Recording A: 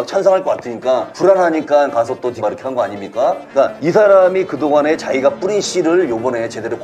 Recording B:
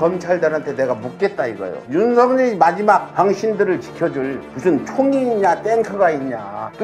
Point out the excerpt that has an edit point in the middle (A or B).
A